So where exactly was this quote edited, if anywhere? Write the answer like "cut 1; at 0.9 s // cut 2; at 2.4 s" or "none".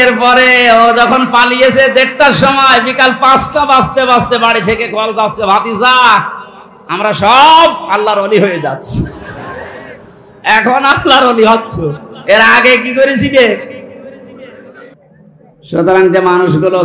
cut 1; at 15.0 s